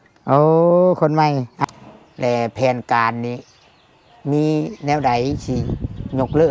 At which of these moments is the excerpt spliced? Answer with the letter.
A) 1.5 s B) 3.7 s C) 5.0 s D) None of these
A